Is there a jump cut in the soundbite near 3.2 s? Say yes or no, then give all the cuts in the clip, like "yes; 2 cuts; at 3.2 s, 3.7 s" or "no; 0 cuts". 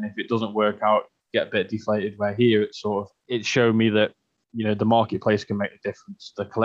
yes; 1 cut; at 3.2 s